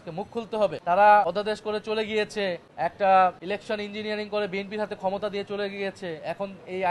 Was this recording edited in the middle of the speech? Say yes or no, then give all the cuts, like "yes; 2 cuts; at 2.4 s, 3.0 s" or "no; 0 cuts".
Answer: yes; 4 cuts; at 0.8 s, 1.2 s, 2.7 s, 3.4 s